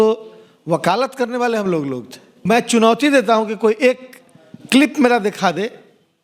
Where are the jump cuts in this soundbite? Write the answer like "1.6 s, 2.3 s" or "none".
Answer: 2.4 s